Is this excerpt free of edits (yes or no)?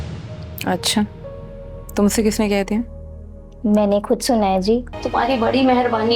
no